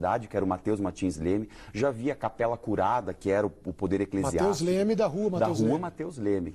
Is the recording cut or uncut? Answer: uncut